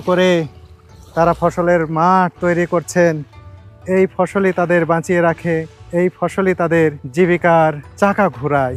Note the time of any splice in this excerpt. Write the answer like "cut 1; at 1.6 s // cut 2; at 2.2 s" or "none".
cut 1; at 5.8 s // cut 2; at 7.0 s // cut 3; at 7.9 s